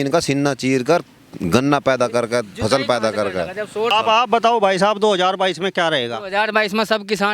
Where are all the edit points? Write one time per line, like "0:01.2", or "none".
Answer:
0:03.9